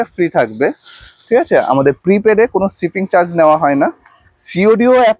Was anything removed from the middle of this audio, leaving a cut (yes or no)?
no